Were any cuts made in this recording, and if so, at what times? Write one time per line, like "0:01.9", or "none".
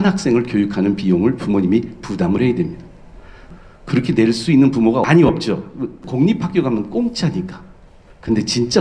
0:03.4
0:05.0
0:06.0